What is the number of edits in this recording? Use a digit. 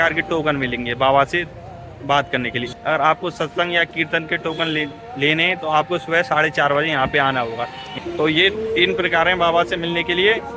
2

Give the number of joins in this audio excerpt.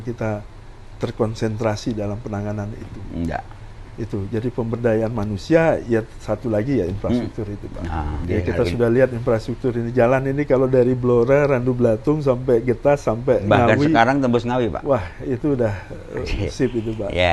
1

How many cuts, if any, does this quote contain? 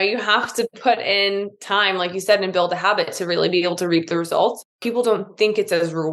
1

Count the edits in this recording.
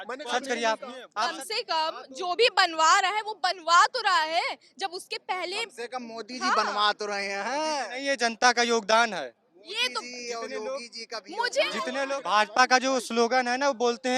2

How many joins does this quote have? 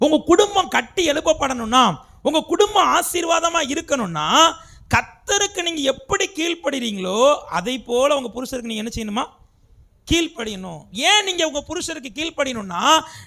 1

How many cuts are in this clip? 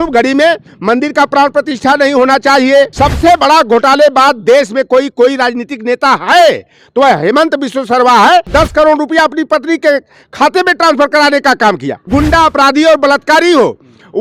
3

